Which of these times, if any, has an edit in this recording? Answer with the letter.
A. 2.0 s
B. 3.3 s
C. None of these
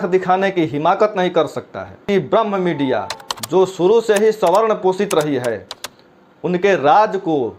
A